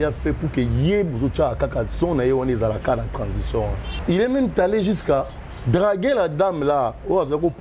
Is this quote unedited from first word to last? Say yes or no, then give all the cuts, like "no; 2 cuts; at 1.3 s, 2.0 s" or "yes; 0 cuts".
no; 1 cut; at 3.9 s